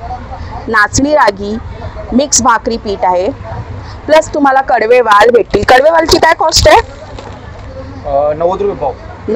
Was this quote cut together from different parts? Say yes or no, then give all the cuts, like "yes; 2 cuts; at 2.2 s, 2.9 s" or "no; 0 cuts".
no; 0 cuts